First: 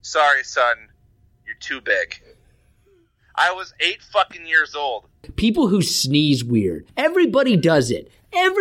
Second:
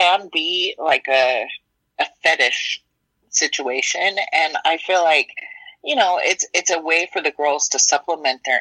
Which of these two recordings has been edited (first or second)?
first